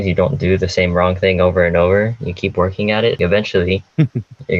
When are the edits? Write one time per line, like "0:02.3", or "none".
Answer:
0:03.2